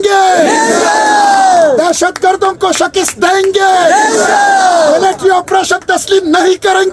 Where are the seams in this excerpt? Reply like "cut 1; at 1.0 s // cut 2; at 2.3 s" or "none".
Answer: none